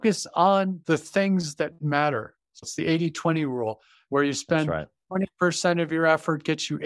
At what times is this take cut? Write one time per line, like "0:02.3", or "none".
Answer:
0:00.8
0:02.1